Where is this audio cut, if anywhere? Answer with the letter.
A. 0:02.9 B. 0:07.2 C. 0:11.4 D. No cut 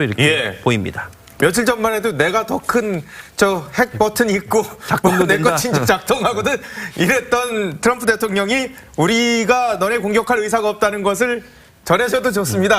B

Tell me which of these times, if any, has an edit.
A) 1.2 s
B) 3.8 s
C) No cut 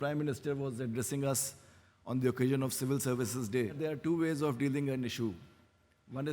B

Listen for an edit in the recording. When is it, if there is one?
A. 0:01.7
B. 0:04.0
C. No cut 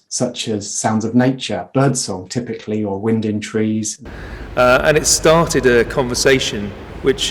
B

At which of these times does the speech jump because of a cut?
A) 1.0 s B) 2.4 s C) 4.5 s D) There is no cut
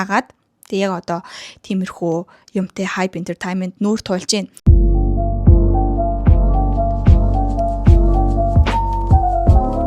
C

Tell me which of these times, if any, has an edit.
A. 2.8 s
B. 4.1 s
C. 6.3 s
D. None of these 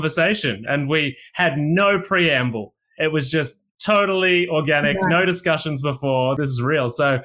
C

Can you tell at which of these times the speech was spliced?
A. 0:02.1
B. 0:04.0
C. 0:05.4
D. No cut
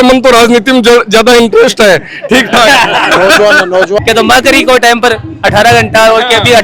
B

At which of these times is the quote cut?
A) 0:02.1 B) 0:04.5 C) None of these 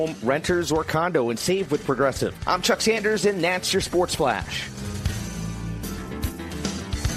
B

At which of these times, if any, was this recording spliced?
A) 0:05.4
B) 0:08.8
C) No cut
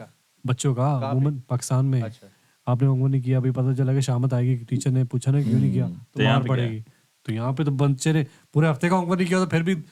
C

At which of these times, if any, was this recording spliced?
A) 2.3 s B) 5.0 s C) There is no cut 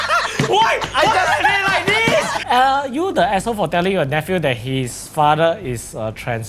A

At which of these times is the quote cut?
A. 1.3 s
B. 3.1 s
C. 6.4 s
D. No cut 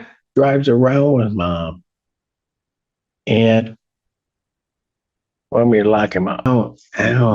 C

